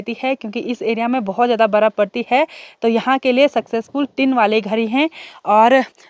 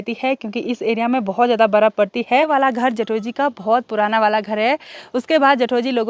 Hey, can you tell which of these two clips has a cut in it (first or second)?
second